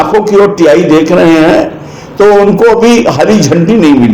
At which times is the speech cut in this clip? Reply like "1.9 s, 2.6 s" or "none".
none